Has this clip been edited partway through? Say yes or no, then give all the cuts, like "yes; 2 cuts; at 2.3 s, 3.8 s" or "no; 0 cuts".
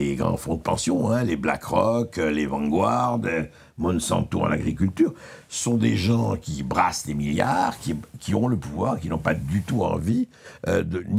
no; 0 cuts